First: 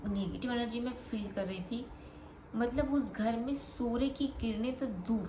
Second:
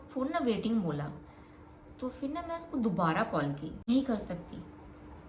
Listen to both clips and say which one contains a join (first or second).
second